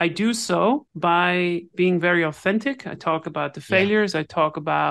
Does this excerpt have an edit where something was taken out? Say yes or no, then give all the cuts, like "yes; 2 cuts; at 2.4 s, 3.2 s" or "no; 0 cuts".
yes; 1 cut; at 0.9 s